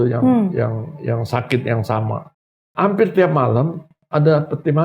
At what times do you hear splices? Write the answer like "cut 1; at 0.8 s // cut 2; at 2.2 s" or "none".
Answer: cut 1; at 2.3 s